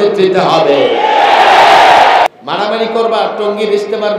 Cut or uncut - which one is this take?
cut